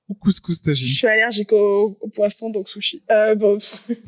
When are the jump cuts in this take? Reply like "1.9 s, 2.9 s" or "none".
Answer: none